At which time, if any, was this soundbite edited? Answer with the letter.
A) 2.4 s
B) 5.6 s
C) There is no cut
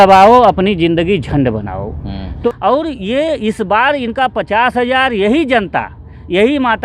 A